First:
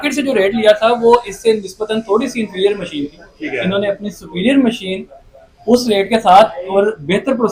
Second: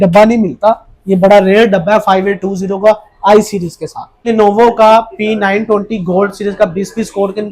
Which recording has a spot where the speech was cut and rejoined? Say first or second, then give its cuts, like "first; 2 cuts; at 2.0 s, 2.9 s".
second; 1 cut; at 4.3 s